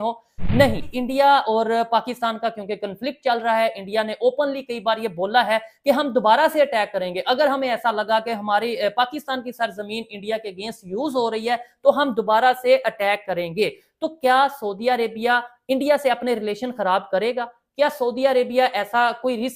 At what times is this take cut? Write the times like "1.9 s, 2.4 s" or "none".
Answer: 0.9 s